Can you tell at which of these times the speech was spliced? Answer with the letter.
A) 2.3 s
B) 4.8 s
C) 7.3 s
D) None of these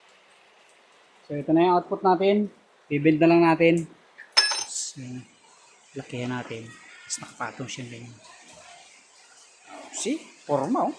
B